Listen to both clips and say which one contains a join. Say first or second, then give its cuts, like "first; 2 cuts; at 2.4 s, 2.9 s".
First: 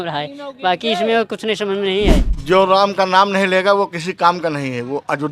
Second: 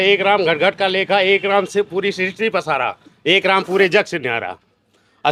first; 1 cut; at 2.3 s